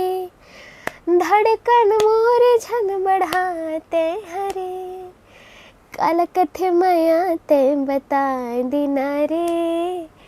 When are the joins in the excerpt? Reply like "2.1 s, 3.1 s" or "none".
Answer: none